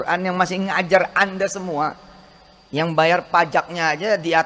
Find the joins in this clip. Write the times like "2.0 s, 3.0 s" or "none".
none